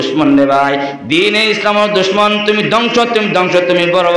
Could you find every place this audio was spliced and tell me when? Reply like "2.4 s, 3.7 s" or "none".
none

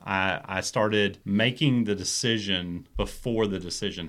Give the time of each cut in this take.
1.2 s, 2.8 s

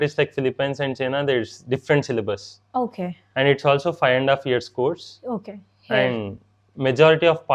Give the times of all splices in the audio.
none

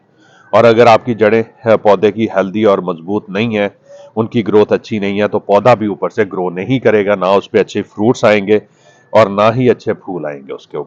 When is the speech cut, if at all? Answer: none

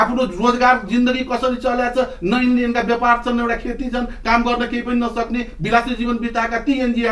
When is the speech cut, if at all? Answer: none

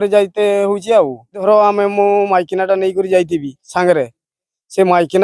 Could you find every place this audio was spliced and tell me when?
1.4 s

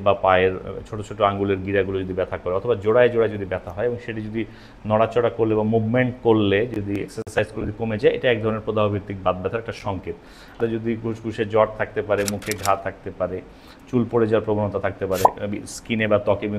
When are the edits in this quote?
10.6 s

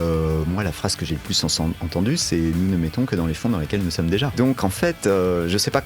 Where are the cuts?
4.3 s

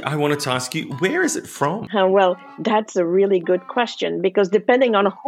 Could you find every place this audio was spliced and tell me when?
1.8 s

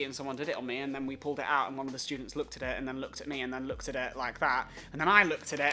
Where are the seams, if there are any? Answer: none

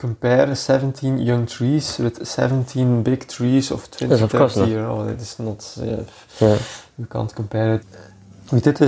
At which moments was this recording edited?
none

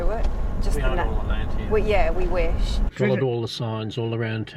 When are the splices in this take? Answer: 2.8 s

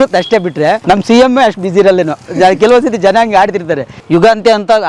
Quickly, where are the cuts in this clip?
0.8 s, 3.9 s

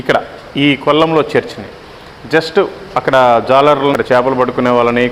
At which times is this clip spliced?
3.9 s

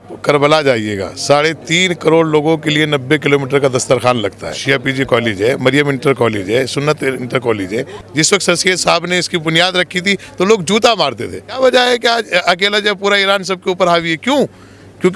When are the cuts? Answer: 4.6 s, 8.0 s, 11.6 s

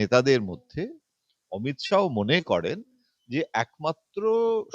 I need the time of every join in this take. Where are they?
none

